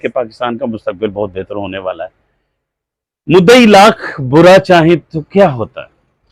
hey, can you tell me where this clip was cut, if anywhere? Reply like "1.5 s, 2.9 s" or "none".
none